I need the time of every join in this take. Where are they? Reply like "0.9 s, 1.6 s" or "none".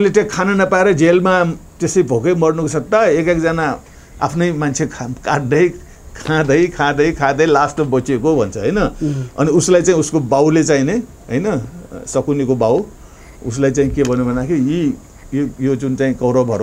none